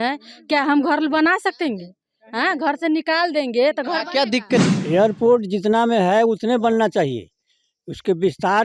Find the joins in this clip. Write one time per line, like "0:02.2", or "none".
0:04.6